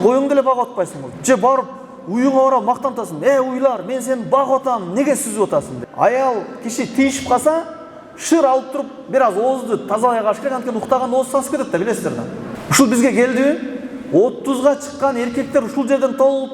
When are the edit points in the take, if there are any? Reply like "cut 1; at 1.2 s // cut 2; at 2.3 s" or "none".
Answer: cut 1; at 1.1 s // cut 2; at 5.9 s // cut 3; at 12.6 s